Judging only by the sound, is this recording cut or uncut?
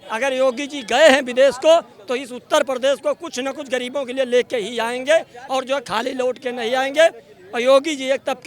uncut